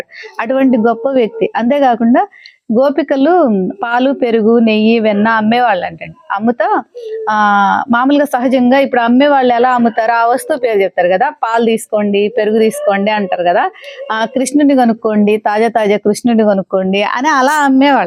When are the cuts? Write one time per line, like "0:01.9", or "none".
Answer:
none